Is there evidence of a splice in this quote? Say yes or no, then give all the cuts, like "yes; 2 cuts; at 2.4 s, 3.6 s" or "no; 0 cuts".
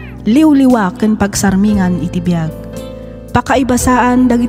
no; 0 cuts